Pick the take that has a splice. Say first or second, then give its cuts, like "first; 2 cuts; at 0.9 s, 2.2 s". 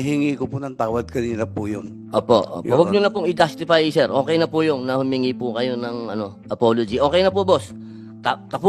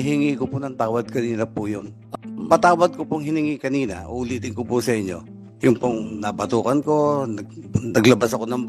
second; 1 cut; at 2.0 s